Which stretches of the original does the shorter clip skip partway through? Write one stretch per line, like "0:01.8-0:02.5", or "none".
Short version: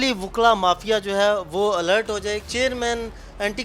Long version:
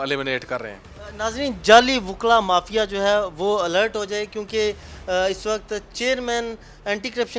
0:04.3-0:05.9